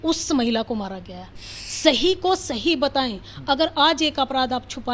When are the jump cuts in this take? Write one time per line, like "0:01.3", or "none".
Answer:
0:01.6

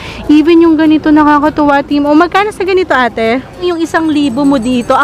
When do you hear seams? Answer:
0:03.6

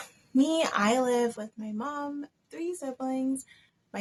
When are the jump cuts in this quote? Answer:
none

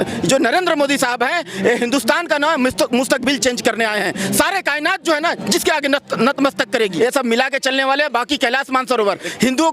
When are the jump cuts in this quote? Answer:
0:06.9

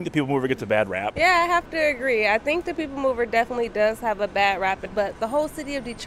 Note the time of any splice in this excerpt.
0:01.1
0:04.9

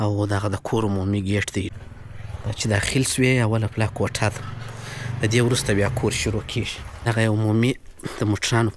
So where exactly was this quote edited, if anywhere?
0:01.7
0:07.1

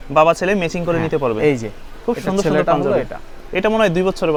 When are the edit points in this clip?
none

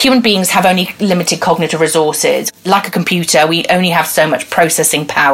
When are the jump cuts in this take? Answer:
0:02.5

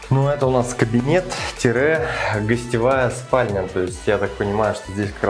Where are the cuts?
none

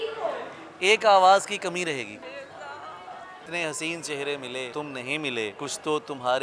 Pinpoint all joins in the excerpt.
0:02.2
0:03.5
0:04.7
0:05.6

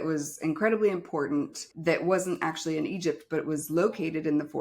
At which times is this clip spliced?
0:01.6

